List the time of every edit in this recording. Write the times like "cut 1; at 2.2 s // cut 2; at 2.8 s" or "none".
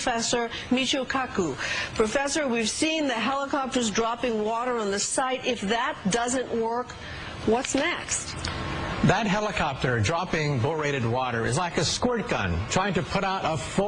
cut 1; at 9.5 s